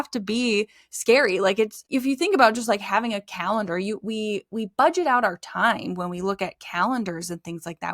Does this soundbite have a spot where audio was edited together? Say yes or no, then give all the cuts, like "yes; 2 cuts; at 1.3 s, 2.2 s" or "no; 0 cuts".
yes; 1 cut; at 1.8 s